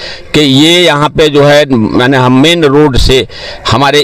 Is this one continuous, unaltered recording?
yes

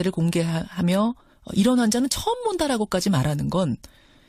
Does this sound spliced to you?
no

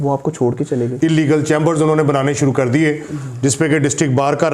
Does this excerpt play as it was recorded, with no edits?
no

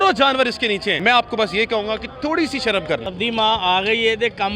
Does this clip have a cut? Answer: yes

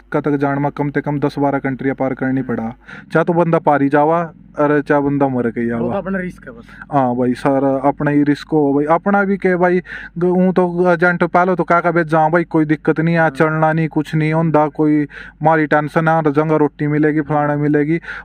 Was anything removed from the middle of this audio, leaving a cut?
yes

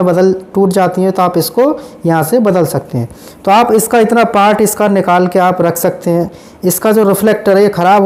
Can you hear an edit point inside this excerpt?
no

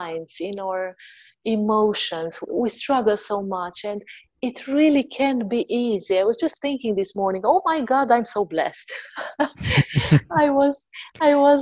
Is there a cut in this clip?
no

